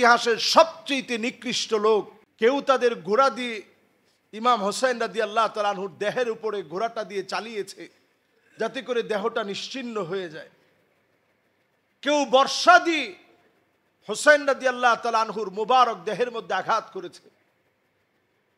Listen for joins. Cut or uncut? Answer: cut